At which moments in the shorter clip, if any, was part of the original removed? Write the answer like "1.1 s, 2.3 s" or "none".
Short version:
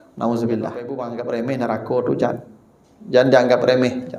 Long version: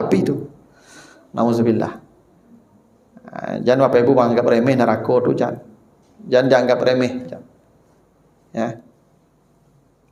1.0 s